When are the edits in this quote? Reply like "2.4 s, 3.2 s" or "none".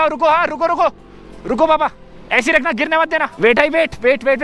3.3 s